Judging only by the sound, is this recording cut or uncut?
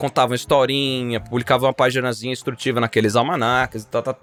uncut